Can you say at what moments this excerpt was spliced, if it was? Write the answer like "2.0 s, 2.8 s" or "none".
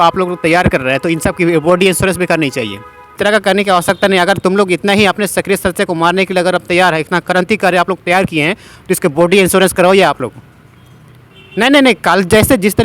3.2 s

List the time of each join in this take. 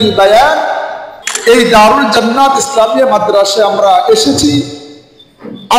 1.3 s

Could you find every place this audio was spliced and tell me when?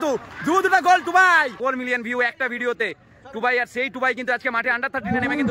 1.6 s

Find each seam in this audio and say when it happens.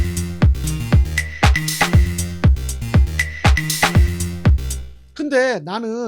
none

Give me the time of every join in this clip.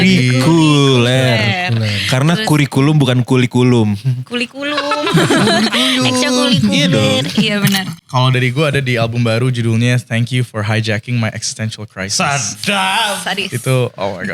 7.9 s

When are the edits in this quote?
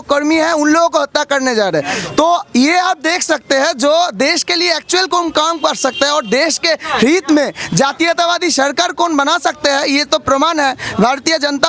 none

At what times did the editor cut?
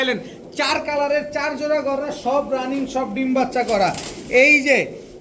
none

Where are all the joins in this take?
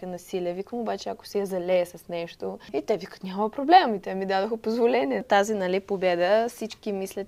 2.7 s, 5.2 s

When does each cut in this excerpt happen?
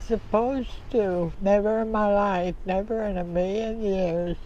1.3 s

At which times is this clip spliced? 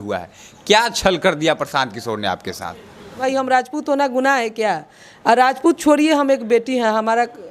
3.2 s

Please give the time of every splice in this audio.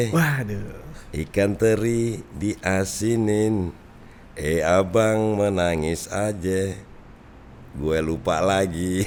none

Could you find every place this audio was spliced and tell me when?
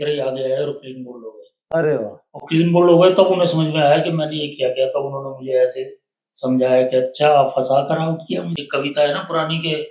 8.6 s

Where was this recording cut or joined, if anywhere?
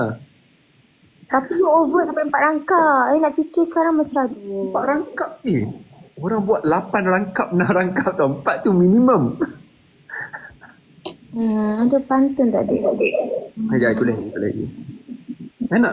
none

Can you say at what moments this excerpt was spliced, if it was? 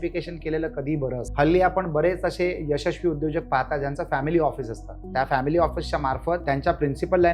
1.3 s, 6.4 s

